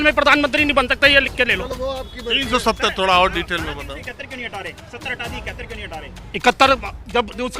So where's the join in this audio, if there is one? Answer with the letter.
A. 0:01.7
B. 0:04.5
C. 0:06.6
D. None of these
A